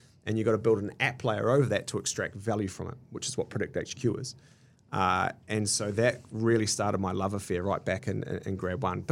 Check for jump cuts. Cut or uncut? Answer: uncut